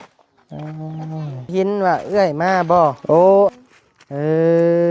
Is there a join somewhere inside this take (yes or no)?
yes